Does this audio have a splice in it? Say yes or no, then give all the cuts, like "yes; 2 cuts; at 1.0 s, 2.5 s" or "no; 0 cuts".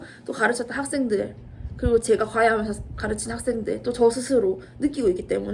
no; 0 cuts